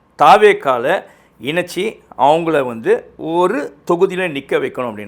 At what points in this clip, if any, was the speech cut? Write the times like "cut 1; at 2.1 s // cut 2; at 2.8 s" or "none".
none